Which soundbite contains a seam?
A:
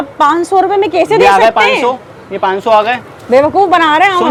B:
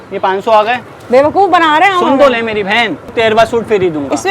B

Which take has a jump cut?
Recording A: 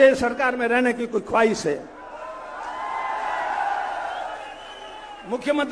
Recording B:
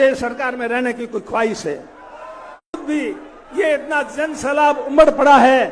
B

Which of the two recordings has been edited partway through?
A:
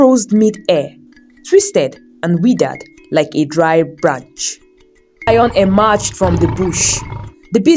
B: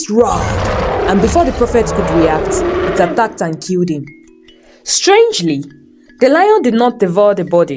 A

